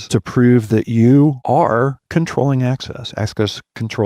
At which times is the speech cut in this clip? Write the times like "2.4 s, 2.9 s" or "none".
1.4 s